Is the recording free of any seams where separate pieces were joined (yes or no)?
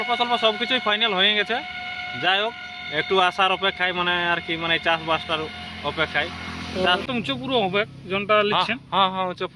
no